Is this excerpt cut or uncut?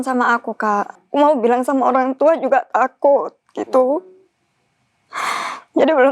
cut